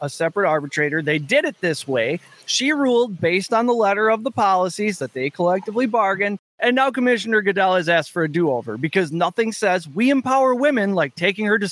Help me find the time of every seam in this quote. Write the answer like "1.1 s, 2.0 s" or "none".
6.4 s